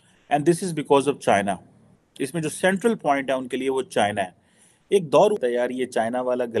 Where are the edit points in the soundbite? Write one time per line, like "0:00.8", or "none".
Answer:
0:05.4